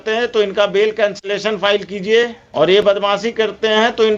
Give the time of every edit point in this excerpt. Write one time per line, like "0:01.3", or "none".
0:02.4